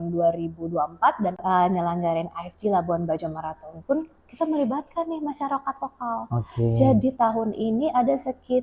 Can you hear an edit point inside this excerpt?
yes; 1 cut; at 1.4 s

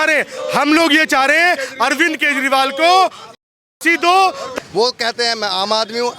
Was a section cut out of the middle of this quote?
yes; 1 cut; at 4.4 s

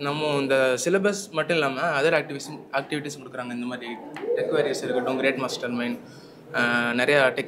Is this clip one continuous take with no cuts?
yes; 0 cuts

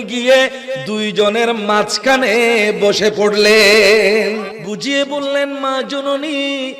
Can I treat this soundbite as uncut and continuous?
no; 1 cut; at 4.6 s

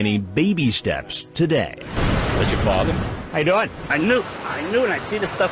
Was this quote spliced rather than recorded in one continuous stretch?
yes; 2 cuts; at 2.0 s, 3.8 s

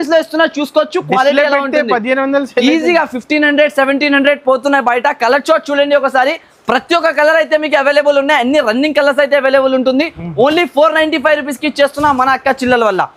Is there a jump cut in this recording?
no; 0 cuts

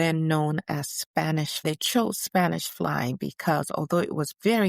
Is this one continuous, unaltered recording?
no; 1 cut; at 1.6 s

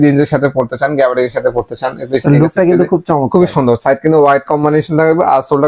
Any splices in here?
no; 0 cuts

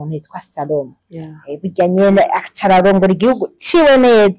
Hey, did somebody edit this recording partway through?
no; 0 cuts

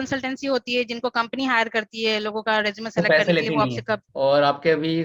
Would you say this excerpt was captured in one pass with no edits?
no; 1 cut; at 4.1 s

